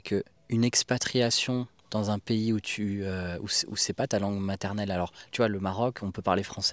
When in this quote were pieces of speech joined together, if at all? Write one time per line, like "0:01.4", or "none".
none

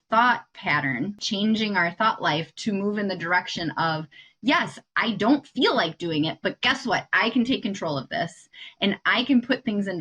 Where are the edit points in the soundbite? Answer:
0:01.2

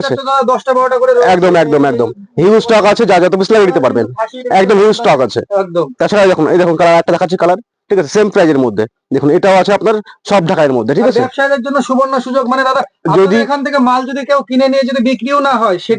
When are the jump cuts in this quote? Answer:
none

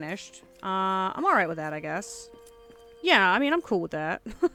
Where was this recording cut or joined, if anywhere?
none

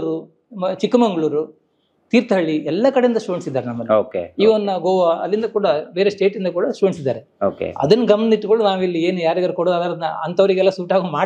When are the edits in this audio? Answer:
none

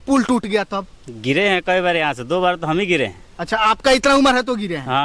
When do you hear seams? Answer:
none

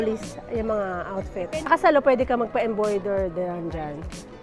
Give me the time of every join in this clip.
0:01.7

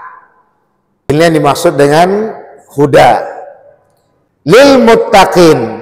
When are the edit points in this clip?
0:01.1
0:04.6

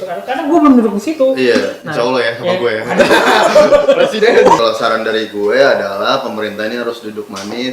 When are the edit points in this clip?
0:04.6

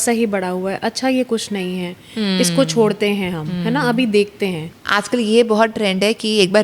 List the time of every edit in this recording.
0:04.7

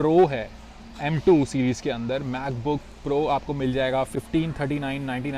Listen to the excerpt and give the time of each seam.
none

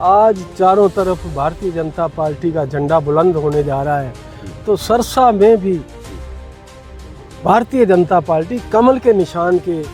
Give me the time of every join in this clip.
none

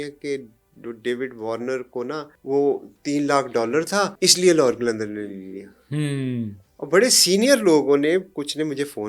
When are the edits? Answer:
0:02.3
0:04.1

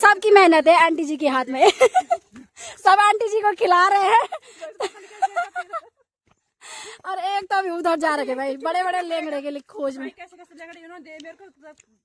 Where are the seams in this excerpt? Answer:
none

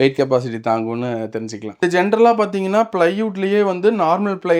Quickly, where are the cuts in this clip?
0:01.6

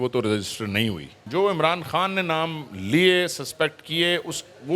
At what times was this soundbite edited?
0:01.2

